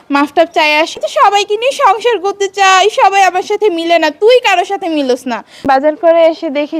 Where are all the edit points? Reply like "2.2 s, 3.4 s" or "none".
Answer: 0.9 s, 5.6 s